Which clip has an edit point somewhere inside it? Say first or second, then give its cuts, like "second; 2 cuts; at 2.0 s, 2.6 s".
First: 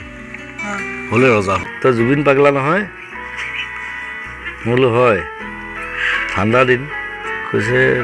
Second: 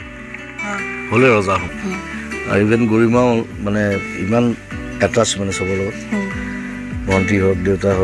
first; 1 cut; at 1.7 s